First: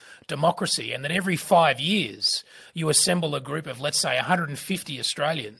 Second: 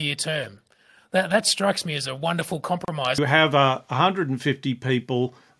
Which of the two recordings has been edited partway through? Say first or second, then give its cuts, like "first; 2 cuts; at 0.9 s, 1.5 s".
second; 1 cut; at 3.2 s